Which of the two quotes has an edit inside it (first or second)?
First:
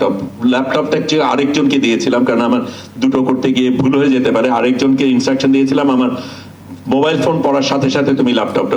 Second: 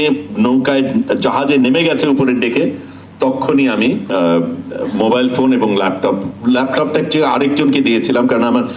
second